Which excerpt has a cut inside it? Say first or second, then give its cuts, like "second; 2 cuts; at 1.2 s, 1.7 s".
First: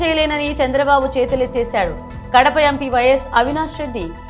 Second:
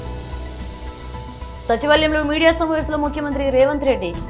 second; 1 cut; at 1.0 s